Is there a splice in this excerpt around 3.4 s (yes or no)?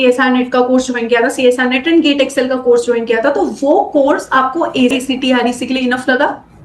no